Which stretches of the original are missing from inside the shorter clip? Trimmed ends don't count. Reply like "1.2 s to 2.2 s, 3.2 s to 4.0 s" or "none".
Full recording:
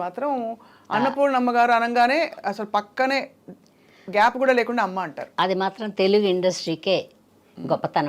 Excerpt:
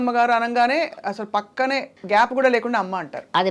3.3 s to 4.0 s